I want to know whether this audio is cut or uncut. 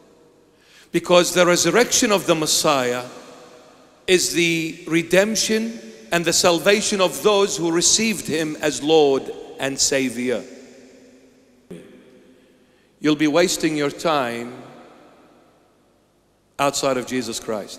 cut